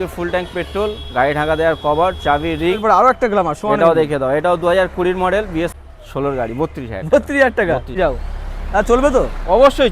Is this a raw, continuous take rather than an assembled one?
no; 3 cuts; at 2.8 s, 5.7 s, 7.9 s

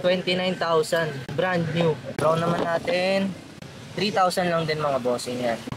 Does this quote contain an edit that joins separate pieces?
no; 0 cuts

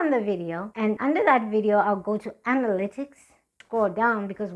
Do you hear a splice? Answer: yes; 2 cuts; at 1.0 s, 3.6 s

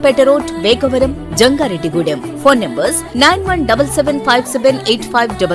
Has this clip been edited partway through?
no; 0 cuts

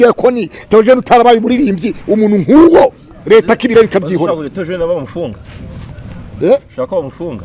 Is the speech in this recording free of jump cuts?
yes; 0 cuts

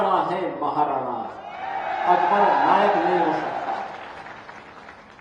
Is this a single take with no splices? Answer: yes; 0 cuts

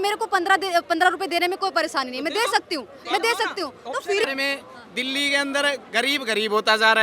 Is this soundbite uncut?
no; 1 cut; at 4.2 s

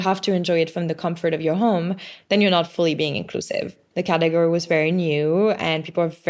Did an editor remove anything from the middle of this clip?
yes; 1 cut; at 3.8 s

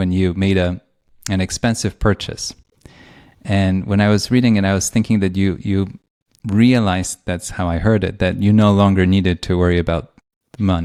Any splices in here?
no; 0 cuts

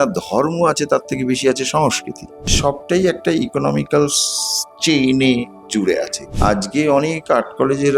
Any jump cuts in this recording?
yes; 2 cuts; at 2.5 s, 6.2 s

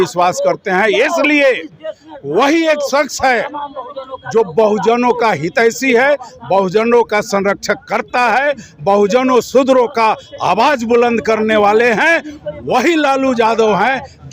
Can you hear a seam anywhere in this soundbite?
no; 0 cuts

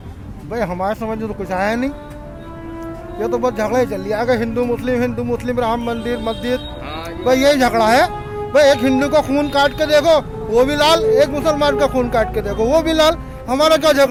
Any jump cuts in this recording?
no; 0 cuts

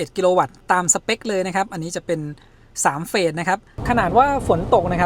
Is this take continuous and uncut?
no; 1 cut; at 3.8 s

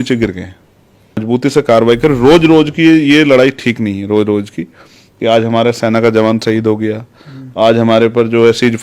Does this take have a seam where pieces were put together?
yes; 1 cut; at 1.2 s

